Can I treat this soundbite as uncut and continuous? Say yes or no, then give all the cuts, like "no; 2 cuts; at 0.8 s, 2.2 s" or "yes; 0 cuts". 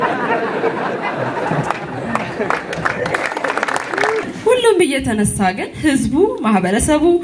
no; 1 cut; at 4.2 s